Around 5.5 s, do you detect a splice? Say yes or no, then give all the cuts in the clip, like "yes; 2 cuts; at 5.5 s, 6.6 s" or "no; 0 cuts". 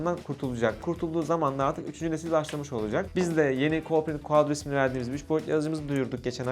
no; 2 cuts; at 0.8 s, 3.1 s